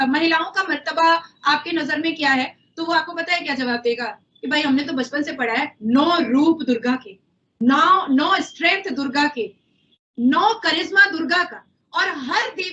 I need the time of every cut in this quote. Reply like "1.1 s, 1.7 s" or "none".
none